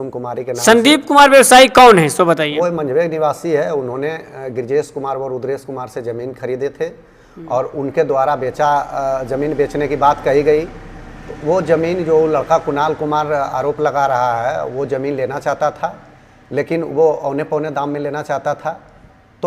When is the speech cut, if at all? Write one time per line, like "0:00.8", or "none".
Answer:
none